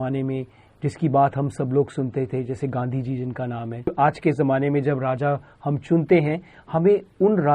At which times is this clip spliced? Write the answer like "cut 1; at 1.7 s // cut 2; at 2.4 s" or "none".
cut 1; at 3.9 s

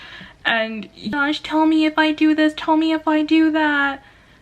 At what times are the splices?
cut 1; at 1.1 s

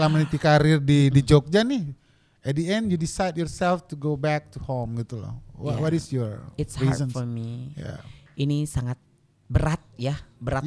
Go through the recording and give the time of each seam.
none

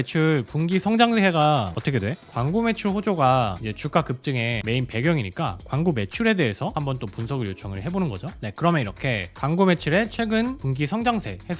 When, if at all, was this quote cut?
none

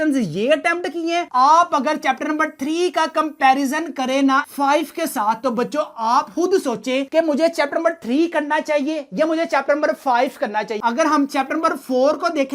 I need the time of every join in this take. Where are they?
cut 1; at 1.3 s // cut 2; at 4.5 s // cut 3; at 10.8 s

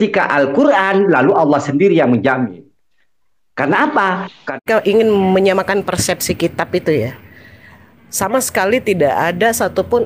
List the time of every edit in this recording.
cut 1; at 4.6 s

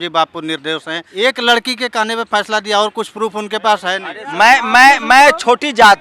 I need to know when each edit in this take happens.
cut 1; at 1.0 s // cut 2; at 4.1 s

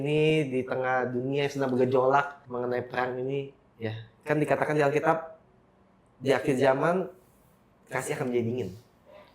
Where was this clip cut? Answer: cut 1; at 2.4 s

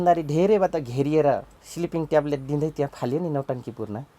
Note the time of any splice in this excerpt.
cut 1; at 1.6 s

